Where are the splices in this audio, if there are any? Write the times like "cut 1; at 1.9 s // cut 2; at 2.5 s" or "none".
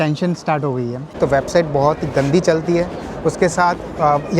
cut 1; at 1.2 s